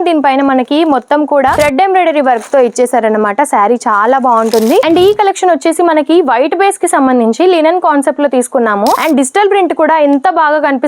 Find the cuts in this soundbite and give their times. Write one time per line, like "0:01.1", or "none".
0:04.9